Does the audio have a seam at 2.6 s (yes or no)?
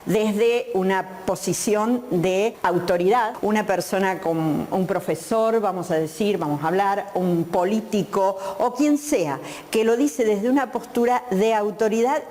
yes